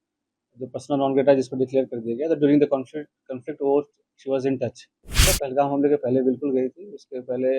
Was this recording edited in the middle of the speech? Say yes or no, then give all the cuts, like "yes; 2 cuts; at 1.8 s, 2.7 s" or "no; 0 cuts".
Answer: yes; 1 cut; at 5.3 s